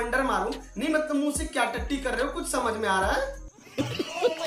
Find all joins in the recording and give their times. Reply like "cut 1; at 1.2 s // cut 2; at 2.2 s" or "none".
cut 1; at 3.6 s